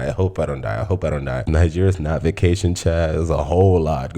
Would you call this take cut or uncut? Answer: cut